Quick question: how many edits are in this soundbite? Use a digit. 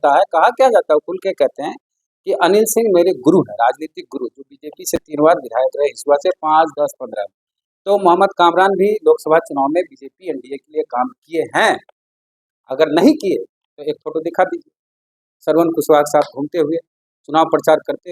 0